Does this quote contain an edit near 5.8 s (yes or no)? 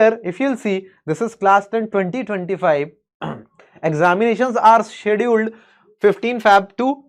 no